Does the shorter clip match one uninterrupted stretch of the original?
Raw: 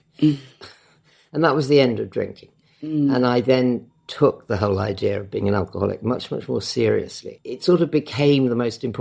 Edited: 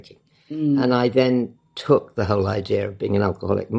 yes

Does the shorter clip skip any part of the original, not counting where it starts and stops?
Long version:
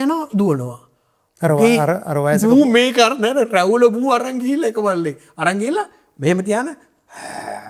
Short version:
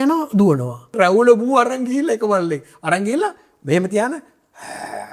yes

